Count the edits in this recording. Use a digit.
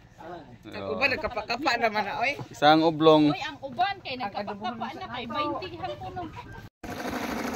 1